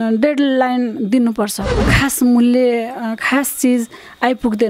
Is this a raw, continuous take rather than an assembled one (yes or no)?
no